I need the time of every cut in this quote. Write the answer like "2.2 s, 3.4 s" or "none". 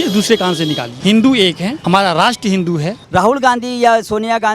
0.9 s, 1.8 s, 3.0 s